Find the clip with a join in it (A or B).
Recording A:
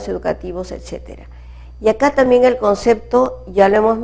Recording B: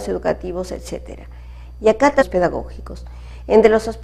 A